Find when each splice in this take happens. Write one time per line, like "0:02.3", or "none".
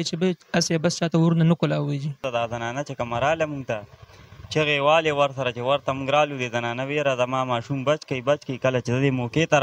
0:02.2